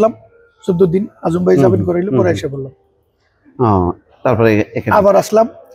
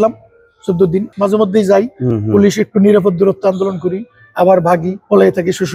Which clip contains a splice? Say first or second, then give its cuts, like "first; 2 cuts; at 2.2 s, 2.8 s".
second; 1 cut; at 1.1 s